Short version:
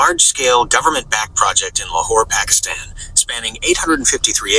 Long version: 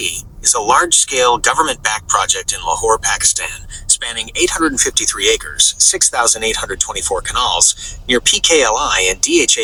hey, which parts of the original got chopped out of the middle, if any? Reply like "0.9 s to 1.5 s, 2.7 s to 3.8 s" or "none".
none